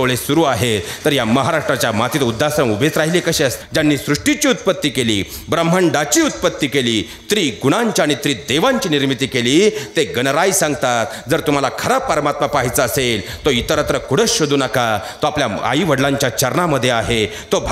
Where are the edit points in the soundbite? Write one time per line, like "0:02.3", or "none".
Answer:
0:03.6